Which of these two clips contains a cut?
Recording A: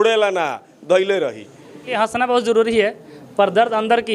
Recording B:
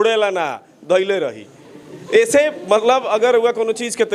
A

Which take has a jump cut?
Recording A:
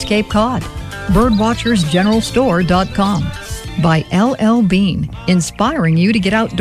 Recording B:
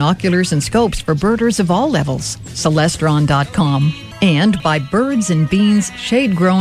B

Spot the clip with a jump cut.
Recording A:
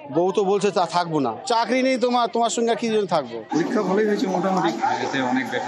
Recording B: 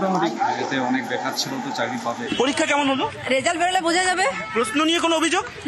A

